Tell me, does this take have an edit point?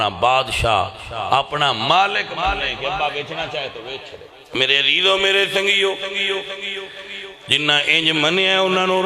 yes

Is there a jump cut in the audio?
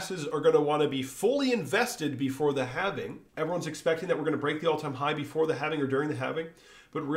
yes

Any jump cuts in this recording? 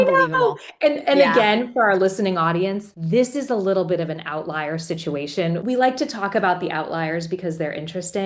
yes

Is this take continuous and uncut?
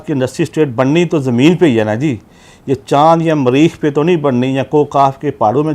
yes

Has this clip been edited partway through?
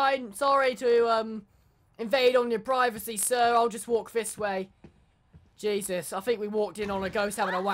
no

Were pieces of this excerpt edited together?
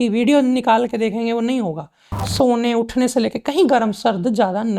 yes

